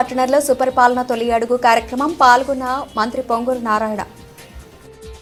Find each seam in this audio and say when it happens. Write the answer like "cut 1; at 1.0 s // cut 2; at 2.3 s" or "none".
none